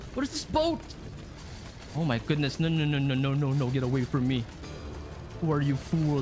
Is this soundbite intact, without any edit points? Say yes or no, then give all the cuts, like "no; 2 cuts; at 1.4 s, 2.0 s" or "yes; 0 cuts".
yes; 0 cuts